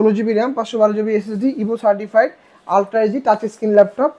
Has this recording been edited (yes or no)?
no